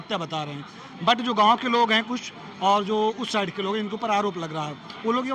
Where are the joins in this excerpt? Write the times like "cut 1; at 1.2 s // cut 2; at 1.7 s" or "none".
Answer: none